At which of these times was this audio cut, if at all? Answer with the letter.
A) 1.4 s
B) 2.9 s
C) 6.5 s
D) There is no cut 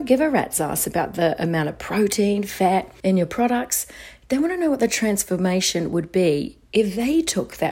B